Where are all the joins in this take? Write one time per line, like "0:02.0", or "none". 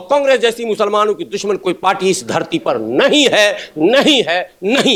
none